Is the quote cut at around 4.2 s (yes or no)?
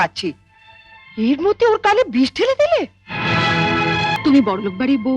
yes